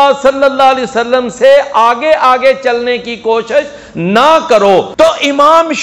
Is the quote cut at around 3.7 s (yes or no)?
no